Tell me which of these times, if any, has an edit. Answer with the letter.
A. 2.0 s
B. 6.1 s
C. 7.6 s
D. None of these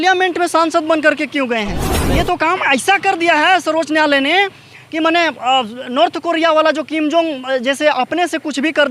A